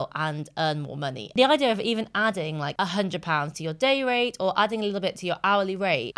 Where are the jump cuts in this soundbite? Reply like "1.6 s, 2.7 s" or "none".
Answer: 1.2 s